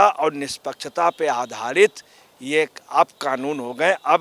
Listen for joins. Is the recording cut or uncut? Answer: uncut